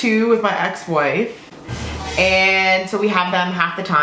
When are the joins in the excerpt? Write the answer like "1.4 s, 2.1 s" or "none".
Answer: none